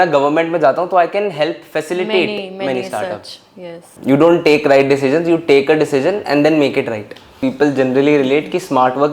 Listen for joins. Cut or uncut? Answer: cut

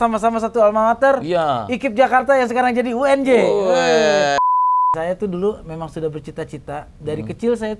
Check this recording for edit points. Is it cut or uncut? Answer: cut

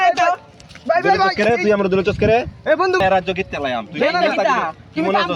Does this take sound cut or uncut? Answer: cut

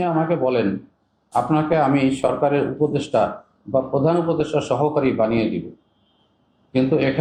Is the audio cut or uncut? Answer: uncut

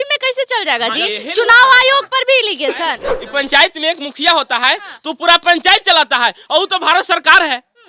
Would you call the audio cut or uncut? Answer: cut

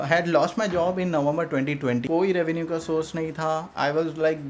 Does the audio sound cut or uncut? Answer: cut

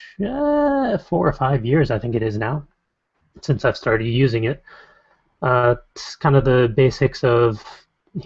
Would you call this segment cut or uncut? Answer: cut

